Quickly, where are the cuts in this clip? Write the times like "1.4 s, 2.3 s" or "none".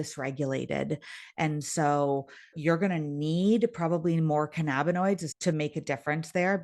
5.3 s